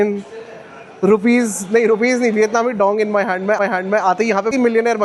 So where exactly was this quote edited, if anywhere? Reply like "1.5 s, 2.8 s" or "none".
none